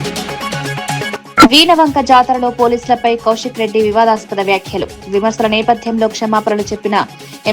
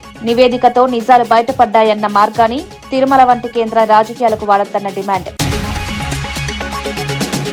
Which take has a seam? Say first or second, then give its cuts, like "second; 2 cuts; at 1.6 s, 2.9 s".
first; 1 cut; at 1.1 s